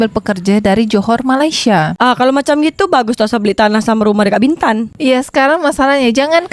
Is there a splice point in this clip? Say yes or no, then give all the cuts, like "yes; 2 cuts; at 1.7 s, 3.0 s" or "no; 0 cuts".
yes; 1 cut; at 1.9 s